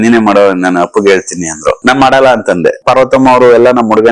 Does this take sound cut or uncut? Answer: cut